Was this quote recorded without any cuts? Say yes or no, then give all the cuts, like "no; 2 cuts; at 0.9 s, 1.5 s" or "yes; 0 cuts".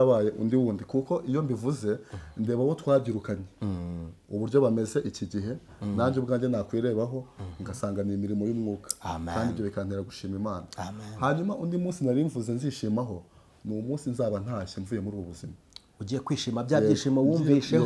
yes; 0 cuts